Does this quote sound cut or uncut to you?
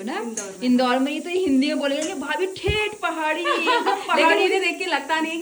uncut